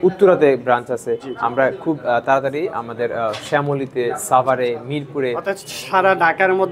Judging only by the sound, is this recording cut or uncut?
uncut